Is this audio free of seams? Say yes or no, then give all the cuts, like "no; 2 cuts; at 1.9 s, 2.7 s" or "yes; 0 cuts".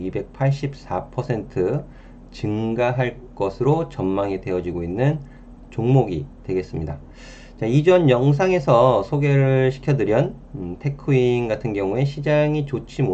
yes; 0 cuts